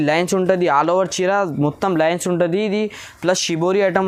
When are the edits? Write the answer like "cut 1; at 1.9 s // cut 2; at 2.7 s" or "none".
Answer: none